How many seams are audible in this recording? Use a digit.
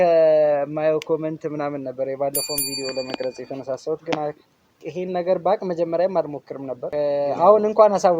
1